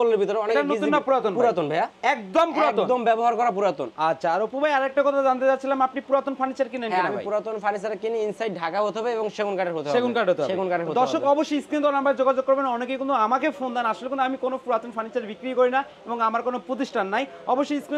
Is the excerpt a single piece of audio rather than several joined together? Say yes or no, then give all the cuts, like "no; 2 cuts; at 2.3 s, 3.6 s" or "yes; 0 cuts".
yes; 0 cuts